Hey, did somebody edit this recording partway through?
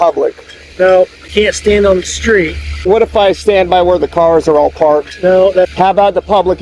yes; 3 cuts; at 1.2 s, 2.8 s, 5.7 s

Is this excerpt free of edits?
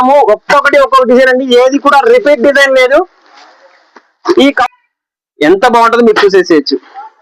no; 1 cut; at 4.6 s

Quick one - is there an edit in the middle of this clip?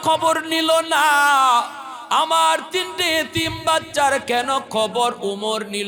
no; 0 cuts

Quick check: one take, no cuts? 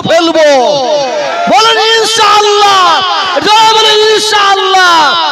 yes; 0 cuts

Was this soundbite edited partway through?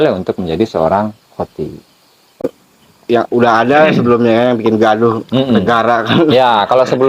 yes; 1 cut; at 2.4 s

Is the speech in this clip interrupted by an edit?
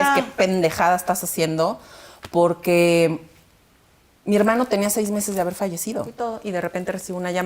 yes; 1 cut; at 6.1 s

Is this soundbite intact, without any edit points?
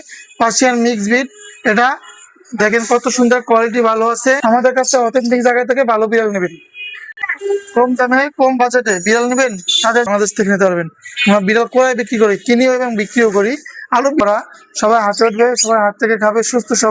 no; 3 cuts; at 4.4 s, 10.1 s, 14.2 s

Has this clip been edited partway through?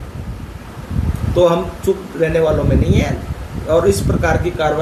no; 0 cuts

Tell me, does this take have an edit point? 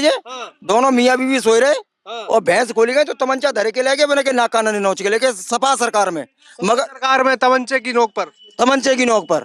no; 0 cuts

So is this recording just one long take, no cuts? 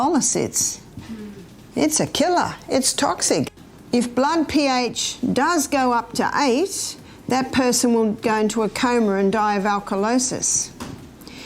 no; 1 cut; at 3.6 s

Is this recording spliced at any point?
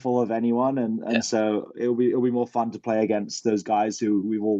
no; 0 cuts

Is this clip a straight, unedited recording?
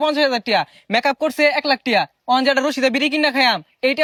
yes; 0 cuts

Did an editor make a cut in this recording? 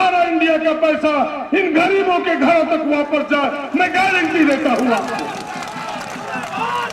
no; 0 cuts

